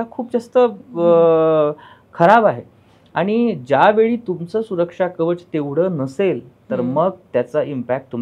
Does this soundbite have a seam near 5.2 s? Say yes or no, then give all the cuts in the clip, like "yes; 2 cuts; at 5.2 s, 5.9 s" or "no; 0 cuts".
no; 0 cuts